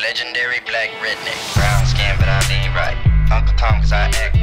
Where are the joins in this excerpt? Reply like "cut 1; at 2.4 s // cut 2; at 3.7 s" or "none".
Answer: cut 1; at 1.5 s